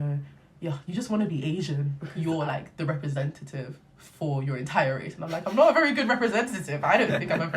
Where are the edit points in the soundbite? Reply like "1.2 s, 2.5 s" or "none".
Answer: 2.0 s